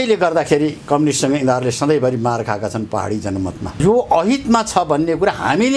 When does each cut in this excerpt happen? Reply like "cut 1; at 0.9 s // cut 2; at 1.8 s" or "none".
cut 1; at 3.7 s

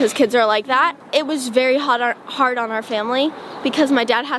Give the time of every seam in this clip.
cut 1; at 1.0 s

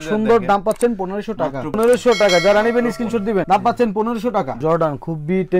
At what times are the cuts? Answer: cut 1; at 1.8 s // cut 2; at 4.5 s

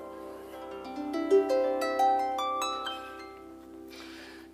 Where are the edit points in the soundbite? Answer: none

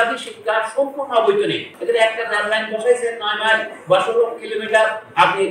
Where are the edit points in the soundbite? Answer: cut 1; at 1.7 s

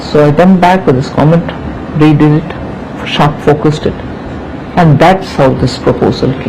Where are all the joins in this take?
cut 1; at 1.1 s

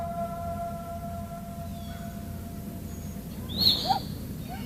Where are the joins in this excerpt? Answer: none

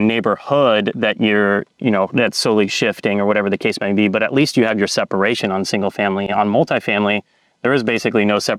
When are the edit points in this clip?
none

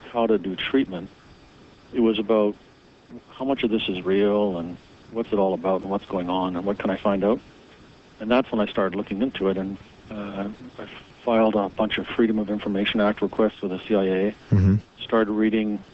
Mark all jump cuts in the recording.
cut 1; at 11.7 s

